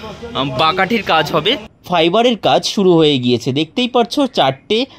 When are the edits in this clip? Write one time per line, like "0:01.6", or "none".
0:01.7